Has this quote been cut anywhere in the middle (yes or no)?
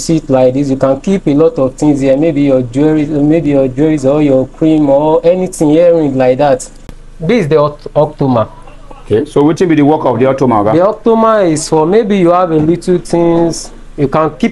yes